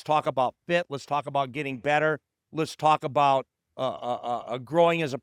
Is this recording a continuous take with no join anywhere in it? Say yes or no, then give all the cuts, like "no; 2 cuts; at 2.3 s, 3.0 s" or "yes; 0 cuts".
yes; 0 cuts